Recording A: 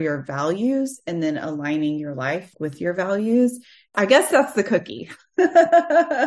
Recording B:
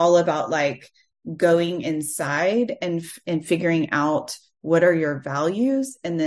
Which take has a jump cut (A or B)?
A